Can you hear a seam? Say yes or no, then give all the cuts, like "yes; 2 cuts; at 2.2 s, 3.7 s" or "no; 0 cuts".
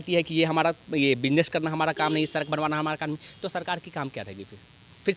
no; 0 cuts